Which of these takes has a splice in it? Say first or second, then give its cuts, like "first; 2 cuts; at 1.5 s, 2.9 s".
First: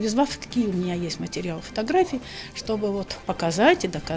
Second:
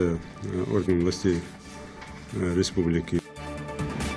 second; 1 cut; at 3.2 s